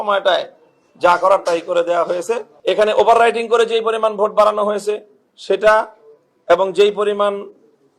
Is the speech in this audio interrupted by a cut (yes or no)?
yes